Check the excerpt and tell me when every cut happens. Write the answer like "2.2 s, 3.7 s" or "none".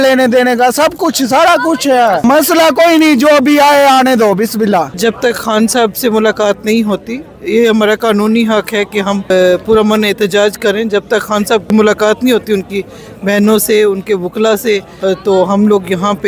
2.2 s, 4.9 s, 9.3 s, 11.7 s, 14.9 s

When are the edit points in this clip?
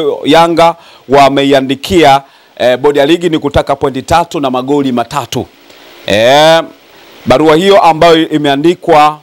none

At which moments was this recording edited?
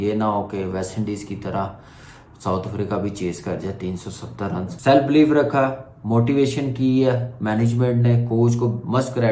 4.7 s

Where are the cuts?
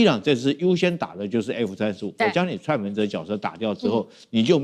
none

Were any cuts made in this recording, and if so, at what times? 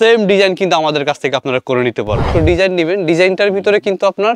2.3 s

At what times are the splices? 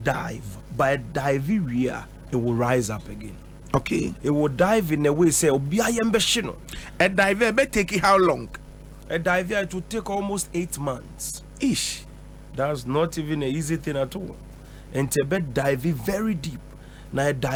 none

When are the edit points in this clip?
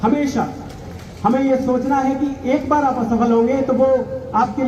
none

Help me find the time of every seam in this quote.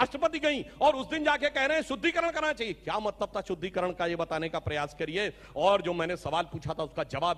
none

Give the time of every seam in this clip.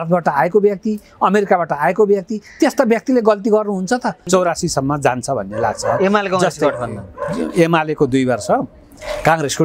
4.3 s

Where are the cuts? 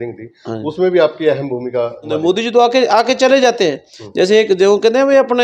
2.2 s

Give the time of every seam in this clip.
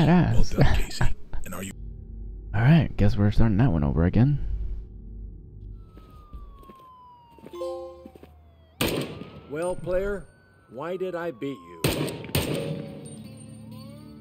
1.7 s

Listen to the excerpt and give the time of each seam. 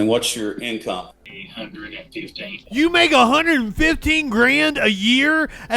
1.3 s, 2.6 s

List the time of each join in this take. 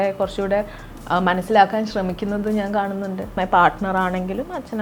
3.3 s

